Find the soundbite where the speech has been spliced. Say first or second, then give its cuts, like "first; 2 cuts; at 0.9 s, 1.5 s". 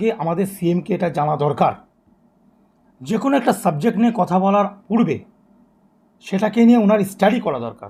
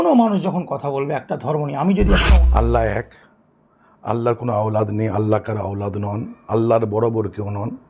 second; 1 cut; at 2.2 s